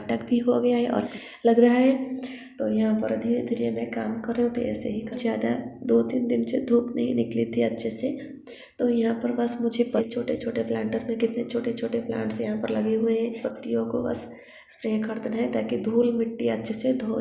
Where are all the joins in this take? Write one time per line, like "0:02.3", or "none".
0:01.1
0:05.1
0:10.0
0:13.4